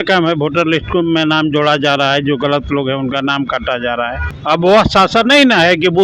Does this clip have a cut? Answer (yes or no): yes